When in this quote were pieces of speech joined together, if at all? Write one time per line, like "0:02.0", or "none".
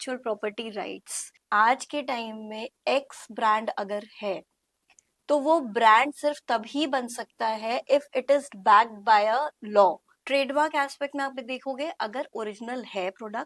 0:01.3
0:10.1

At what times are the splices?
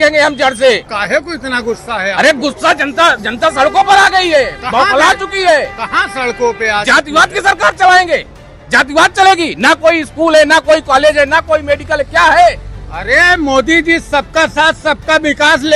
0:00.9

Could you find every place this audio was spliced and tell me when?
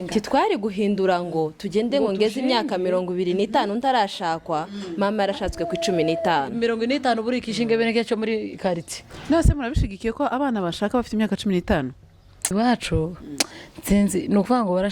0:12.5

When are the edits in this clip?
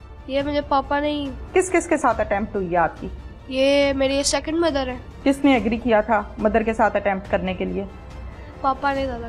0:01.4
0:05.0

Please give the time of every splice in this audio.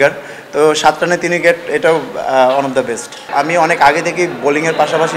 0:03.2

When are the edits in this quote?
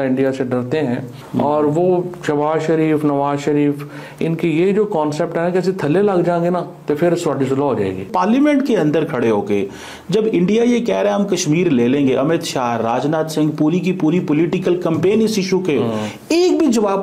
0:01.2
0:08.1

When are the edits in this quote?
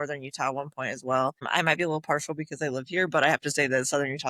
0:01.4

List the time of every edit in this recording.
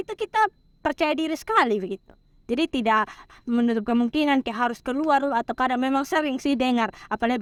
none

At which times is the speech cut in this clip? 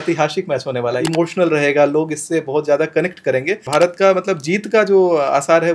0:01.0
0:03.7

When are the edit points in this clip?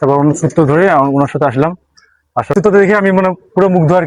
0:02.5

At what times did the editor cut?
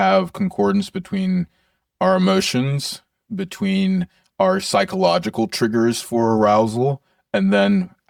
none

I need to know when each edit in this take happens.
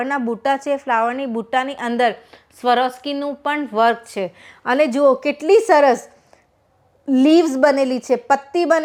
none

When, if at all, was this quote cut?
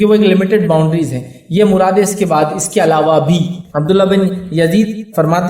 0:03.6

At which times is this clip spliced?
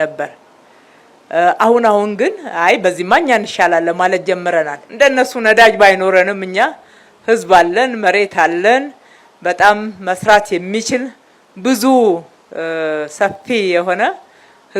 0:04.8

